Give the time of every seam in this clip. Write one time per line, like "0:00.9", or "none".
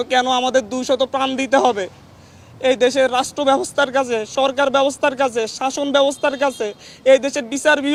none

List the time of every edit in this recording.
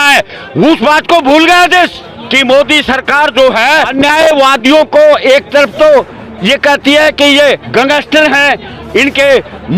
0:02.1
0:03.9
0:07.6

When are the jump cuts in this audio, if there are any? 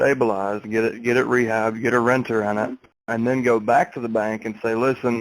0:03.0

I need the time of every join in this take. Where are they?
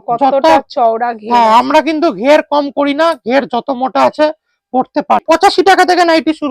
0:05.2

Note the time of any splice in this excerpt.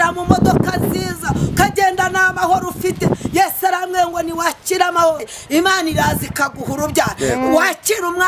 0:05.3

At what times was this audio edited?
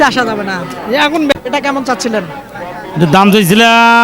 0:01.3

